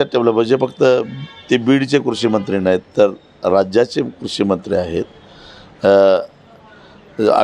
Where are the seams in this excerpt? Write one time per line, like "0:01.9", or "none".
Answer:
none